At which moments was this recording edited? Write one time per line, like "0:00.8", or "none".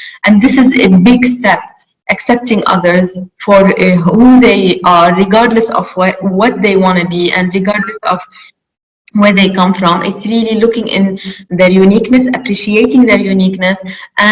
none